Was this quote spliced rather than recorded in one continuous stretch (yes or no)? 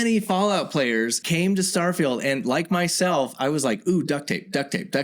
yes